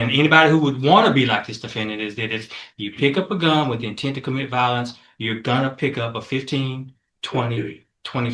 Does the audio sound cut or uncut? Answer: uncut